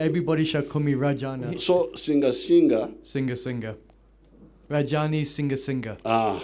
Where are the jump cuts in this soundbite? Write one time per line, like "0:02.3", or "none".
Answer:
0:04.2